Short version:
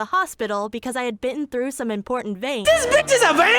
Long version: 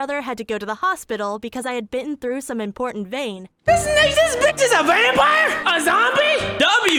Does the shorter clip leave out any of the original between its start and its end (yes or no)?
yes